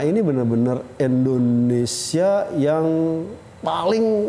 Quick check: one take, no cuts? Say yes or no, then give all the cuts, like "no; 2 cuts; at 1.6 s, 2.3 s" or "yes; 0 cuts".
yes; 0 cuts